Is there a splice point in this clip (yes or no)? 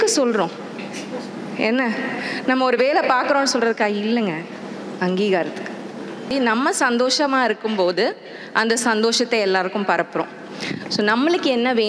yes